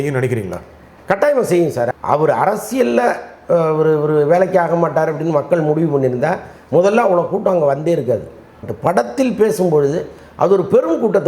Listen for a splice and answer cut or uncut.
cut